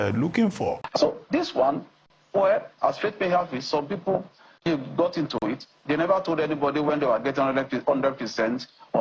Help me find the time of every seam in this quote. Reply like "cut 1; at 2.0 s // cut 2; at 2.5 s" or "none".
cut 1; at 0.9 s